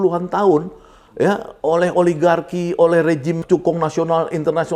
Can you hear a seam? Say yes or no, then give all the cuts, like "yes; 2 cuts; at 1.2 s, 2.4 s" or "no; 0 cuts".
yes; 1 cut; at 3.4 s